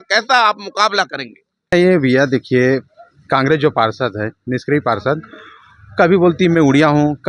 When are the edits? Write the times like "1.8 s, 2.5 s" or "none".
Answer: 1.7 s